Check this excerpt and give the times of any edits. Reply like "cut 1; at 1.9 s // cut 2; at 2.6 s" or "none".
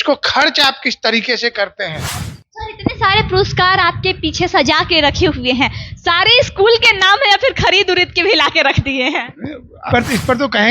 cut 1; at 2.2 s // cut 2; at 9.8 s